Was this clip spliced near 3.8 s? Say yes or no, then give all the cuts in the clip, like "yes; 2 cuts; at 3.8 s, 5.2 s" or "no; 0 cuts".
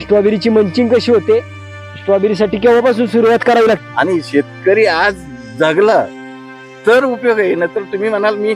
yes; 1 cut; at 3.8 s